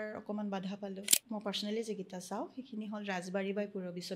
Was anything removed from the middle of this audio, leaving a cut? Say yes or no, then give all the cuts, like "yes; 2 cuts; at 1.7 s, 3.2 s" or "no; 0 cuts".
yes; 1 cut; at 1.1 s